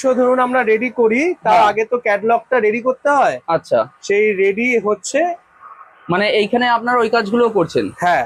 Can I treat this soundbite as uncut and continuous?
yes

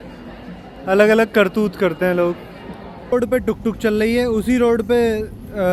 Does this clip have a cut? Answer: yes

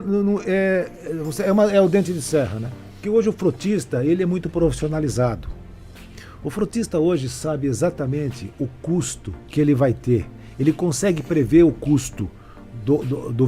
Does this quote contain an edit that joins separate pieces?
yes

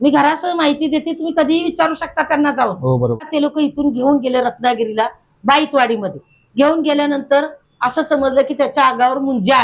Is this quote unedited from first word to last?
no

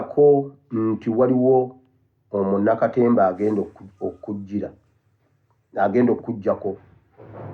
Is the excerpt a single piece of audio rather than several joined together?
yes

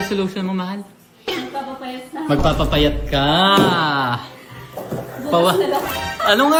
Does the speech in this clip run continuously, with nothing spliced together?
yes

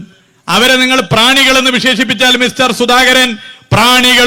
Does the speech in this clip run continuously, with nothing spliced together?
yes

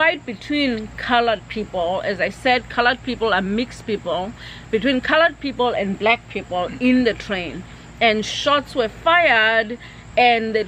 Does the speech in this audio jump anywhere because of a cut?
no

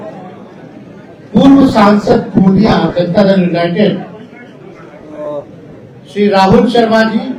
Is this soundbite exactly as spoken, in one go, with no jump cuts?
yes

